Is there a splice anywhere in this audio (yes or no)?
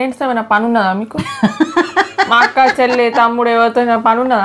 no